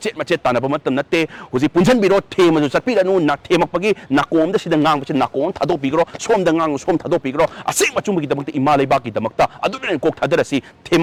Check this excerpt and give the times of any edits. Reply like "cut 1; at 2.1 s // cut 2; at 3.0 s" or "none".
none